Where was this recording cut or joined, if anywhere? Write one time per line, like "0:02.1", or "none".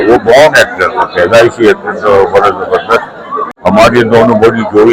0:03.5